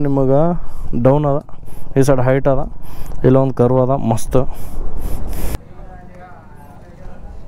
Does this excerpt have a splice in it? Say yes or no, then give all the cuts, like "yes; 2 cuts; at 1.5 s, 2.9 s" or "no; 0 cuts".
yes; 1 cut; at 5.6 s